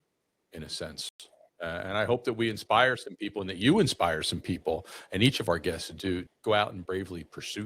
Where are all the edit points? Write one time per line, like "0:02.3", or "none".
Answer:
0:06.3